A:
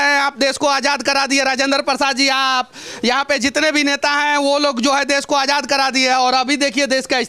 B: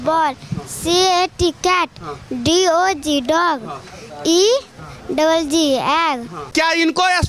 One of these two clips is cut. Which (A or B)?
B